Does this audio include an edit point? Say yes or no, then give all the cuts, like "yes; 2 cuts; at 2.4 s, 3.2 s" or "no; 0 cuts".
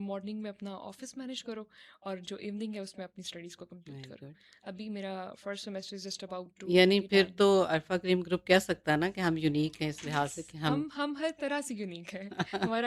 no; 0 cuts